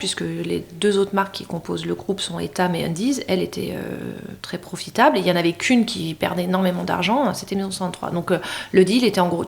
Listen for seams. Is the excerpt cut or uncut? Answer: uncut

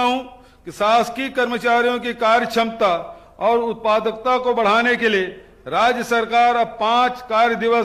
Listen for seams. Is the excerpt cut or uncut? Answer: uncut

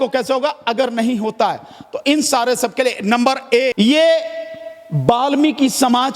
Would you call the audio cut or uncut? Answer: cut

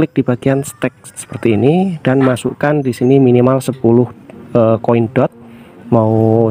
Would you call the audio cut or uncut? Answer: uncut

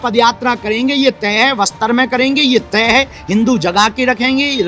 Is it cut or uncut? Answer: uncut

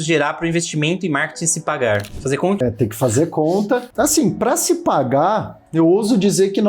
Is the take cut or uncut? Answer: cut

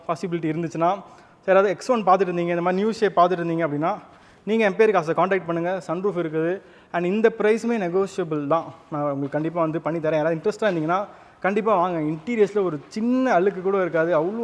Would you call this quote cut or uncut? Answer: uncut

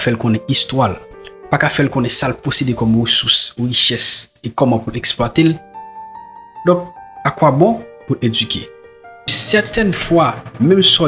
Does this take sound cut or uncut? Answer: cut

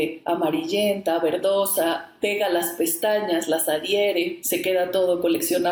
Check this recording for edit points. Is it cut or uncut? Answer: uncut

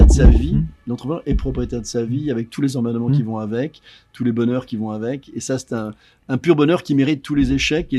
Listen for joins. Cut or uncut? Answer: uncut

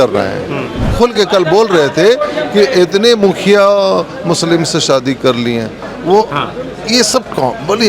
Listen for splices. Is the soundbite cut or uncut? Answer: cut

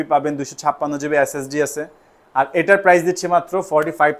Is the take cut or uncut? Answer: uncut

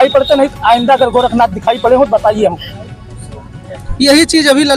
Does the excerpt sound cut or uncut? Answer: uncut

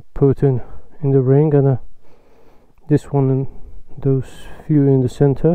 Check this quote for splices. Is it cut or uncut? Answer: uncut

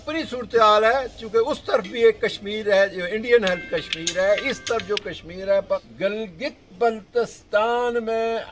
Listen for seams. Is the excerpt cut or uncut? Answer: cut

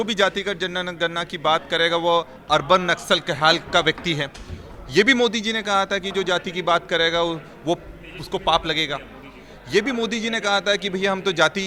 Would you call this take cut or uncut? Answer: uncut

